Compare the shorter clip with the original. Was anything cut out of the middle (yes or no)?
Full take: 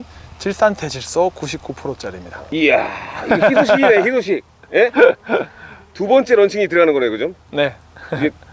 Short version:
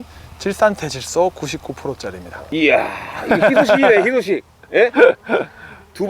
no